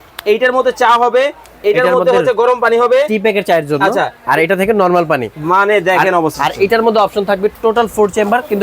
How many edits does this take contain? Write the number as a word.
one